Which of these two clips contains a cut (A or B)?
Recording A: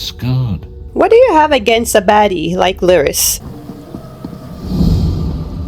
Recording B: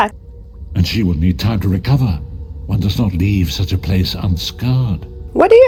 A